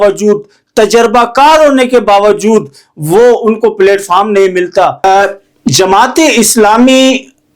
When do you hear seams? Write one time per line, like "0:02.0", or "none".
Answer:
0:05.0